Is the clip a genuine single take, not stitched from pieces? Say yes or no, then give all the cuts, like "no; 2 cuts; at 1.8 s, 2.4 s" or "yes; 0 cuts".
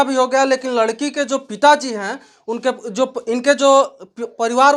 yes; 0 cuts